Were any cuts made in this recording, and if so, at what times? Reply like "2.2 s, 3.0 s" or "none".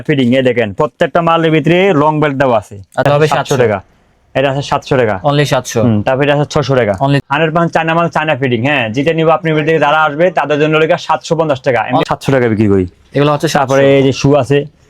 3.0 s, 7.2 s, 12.0 s